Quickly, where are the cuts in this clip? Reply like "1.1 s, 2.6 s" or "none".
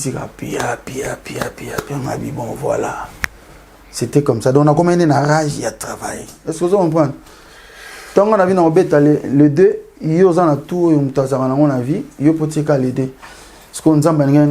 6.4 s